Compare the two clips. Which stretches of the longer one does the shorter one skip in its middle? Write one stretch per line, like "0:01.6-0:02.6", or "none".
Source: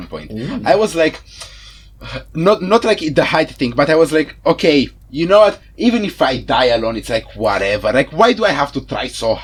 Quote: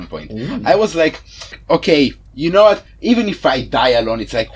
0:01.6-0:04.3